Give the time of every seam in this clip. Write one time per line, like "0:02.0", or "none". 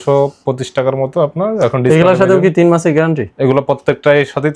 none